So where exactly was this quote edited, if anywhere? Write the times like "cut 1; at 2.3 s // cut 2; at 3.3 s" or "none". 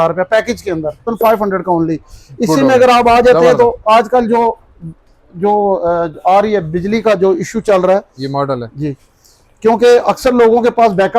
cut 1; at 1.1 s